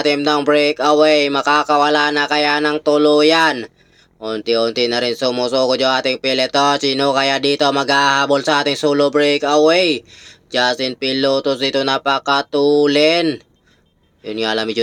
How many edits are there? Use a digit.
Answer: 0